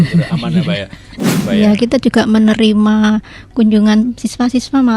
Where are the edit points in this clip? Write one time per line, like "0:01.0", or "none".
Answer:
0:01.3